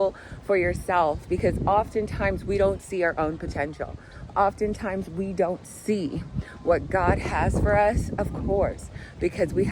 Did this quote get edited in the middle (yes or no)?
no